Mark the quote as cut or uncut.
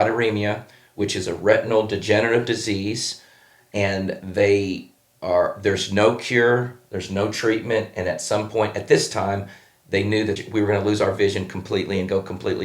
cut